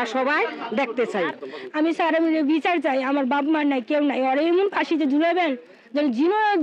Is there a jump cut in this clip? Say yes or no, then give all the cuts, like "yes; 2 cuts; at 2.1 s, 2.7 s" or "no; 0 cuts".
yes; 1 cut; at 1.4 s